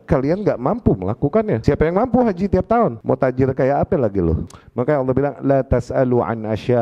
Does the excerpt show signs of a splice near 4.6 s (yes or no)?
yes